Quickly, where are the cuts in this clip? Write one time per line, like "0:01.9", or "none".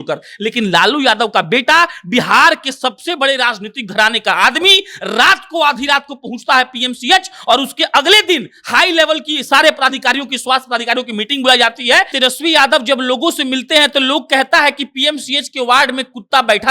0:12.1